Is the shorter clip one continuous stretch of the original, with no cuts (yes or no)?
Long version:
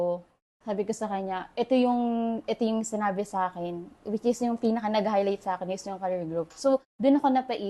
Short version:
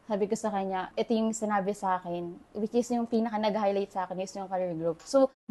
no